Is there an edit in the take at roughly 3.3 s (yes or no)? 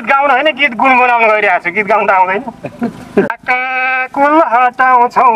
yes